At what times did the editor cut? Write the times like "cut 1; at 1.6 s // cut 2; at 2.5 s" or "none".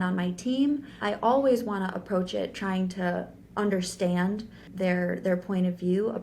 cut 1; at 0.9 s // cut 2; at 4.7 s